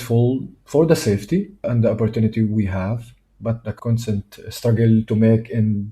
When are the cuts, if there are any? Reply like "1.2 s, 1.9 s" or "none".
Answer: 1.7 s

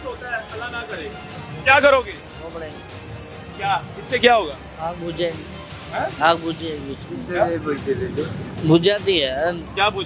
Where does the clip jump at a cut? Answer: none

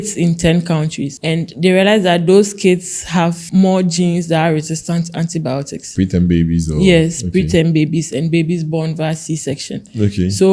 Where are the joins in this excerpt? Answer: 1.4 s, 3.4 s

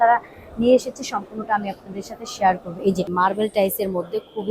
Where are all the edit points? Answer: 3.1 s

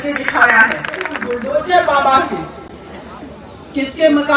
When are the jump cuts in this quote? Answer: 1.2 s

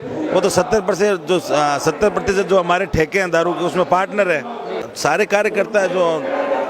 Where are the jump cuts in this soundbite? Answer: 4.8 s

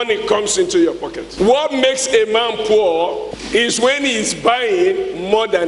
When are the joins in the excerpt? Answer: 1.2 s, 3.3 s

